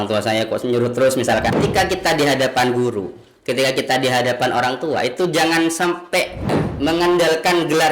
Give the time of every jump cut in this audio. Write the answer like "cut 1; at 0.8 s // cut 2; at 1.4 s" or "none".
cut 1; at 1.5 s // cut 2; at 6.6 s